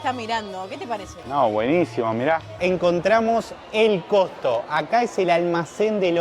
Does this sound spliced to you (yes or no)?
yes